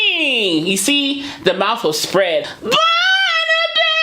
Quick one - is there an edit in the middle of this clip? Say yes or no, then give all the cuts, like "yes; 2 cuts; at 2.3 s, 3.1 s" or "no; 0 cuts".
yes; 1 cut; at 2.5 s